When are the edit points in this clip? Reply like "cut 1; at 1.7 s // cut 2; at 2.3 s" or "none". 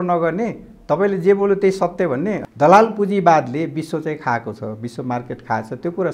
cut 1; at 2.4 s

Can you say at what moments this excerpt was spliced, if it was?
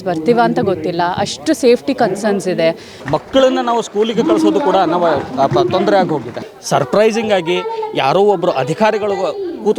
cut 1; at 2.9 s // cut 2; at 6.3 s

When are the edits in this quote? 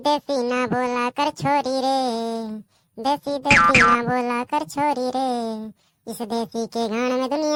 none

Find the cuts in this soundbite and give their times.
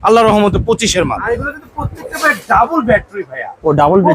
cut 1; at 1.3 s

